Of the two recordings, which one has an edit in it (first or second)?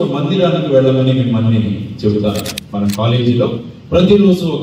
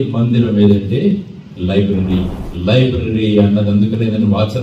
second